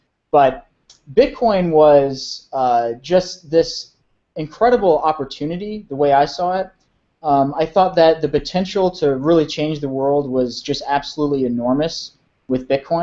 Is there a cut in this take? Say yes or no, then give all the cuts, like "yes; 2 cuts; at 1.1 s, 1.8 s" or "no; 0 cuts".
yes; 1 cut; at 5.7 s